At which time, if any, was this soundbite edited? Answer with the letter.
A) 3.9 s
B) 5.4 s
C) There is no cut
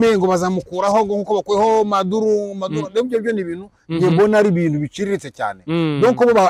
C